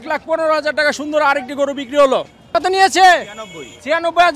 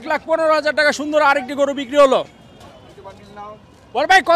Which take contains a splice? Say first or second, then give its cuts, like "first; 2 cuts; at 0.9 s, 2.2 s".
first; 1 cut; at 2.6 s